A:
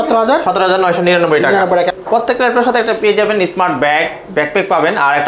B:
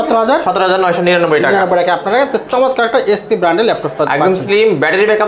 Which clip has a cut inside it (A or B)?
A